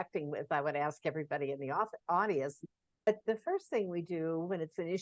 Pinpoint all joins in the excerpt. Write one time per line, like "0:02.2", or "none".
0:03.1